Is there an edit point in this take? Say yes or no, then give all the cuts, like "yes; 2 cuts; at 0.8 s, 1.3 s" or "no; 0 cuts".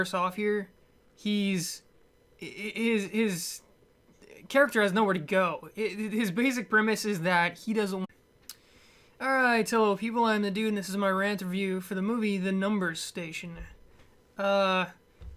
no; 0 cuts